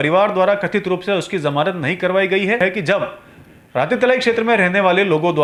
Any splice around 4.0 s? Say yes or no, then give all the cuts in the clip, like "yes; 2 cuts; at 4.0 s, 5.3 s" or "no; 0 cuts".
no; 1 cut; at 2.6 s